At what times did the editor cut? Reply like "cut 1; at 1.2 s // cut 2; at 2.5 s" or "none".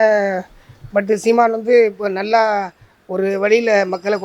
none